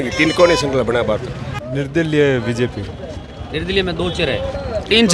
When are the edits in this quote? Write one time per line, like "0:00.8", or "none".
0:01.5